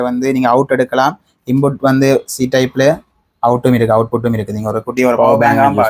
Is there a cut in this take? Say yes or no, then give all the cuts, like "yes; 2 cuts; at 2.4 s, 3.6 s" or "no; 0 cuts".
no; 0 cuts